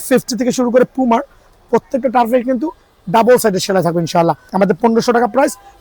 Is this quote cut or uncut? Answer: cut